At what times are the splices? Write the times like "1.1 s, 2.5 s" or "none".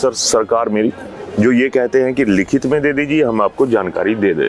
none